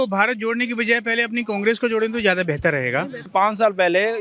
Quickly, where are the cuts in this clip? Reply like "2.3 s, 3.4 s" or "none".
3.3 s